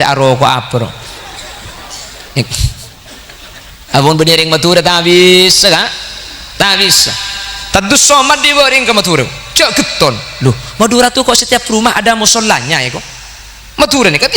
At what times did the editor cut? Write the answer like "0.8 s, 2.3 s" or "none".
3.7 s

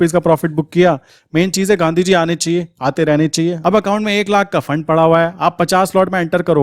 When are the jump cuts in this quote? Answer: 3.6 s

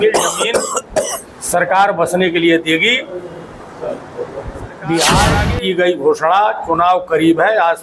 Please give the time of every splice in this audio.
5.4 s

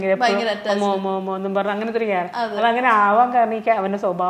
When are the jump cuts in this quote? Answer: none

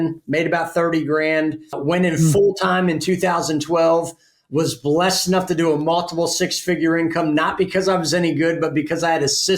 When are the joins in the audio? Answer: 1.8 s

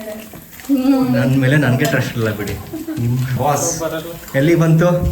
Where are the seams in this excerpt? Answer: 3.4 s

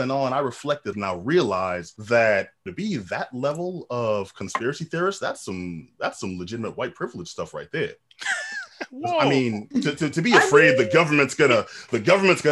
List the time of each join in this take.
0.9 s, 1.9 s, 2.6 s

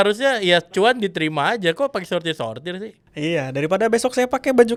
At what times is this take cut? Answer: none

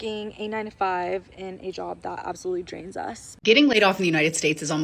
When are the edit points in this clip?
3.3 s

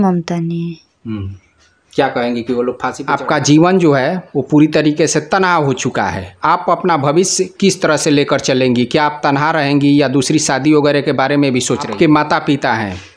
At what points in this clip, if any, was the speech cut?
2.9 s, 11.9 s

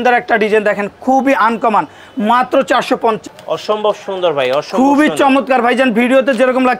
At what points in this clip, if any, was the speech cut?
3.2 s

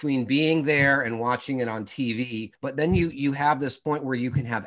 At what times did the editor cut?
2.5 s, 3.8 s

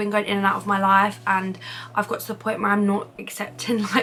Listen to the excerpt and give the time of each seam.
none

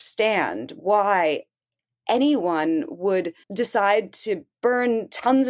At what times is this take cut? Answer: 3.4 s

